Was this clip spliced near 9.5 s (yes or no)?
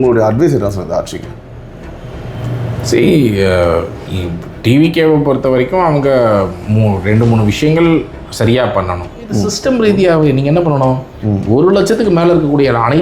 yes